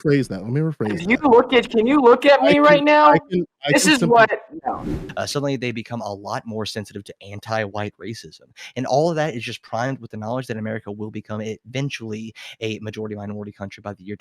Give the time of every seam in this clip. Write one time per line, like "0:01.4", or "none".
0:04.8